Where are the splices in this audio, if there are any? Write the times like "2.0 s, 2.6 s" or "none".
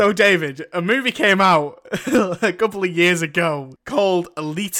3.7 s